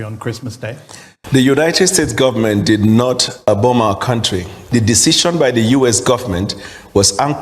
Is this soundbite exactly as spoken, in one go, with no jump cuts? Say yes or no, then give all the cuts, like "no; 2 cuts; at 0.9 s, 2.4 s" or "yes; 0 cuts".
no; 1 cut; at 1.1 s